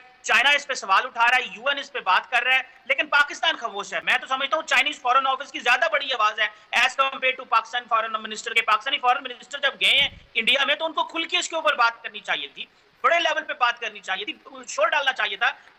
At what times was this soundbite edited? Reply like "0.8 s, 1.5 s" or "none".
none